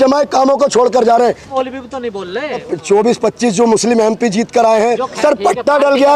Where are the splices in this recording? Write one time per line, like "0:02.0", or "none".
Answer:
0:01.4
0:02.7
0:05.2